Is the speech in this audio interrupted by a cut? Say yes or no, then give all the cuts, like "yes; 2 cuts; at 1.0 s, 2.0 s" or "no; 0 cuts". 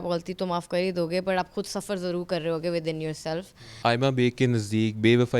yes; 1 cut; at 3.7 s